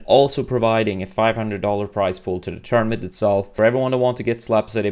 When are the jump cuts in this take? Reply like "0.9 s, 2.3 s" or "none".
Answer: 3.5 s